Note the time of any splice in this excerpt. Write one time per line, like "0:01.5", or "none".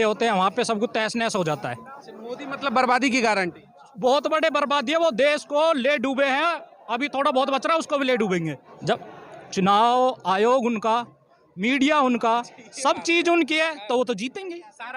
0:08.7